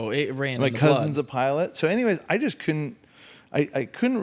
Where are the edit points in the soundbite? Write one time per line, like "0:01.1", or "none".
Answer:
none